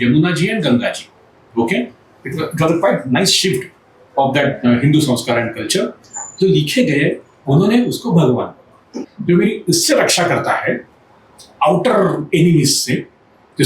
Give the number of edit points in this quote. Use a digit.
1